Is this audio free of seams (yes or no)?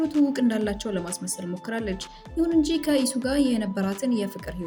yes